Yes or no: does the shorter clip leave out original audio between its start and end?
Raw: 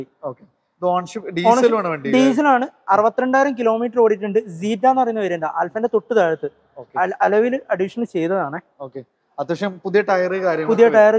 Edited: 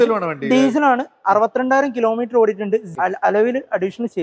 yes